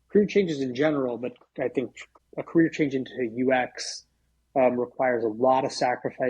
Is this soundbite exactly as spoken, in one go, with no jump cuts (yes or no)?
no